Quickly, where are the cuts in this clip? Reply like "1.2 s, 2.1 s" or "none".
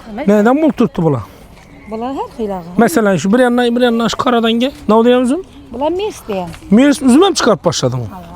4.8 s, 6.5 s

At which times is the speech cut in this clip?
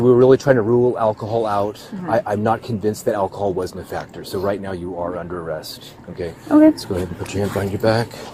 none

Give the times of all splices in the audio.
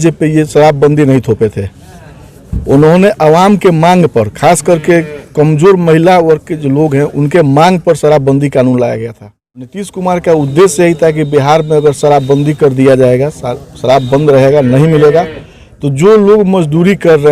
9.8 s

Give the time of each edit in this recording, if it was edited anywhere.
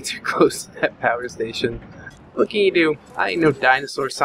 1.6 s, 3.1 s

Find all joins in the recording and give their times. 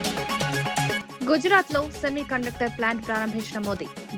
1.0 s

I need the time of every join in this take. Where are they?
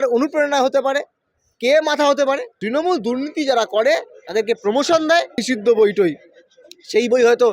2.5 s, 5.4 s

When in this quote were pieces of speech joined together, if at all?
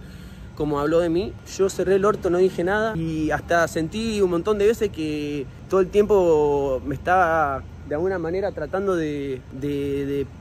1.4 s, 3.0 s, 5.5 s, 9.5 s

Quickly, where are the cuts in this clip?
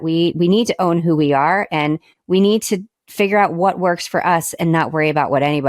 2.1 s

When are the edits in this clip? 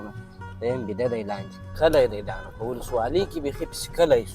1.6 s

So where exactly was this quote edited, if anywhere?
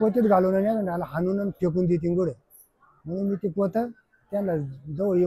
none

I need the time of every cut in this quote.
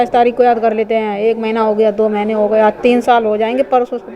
none

